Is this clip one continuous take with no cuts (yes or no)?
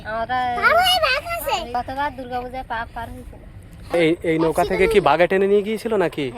no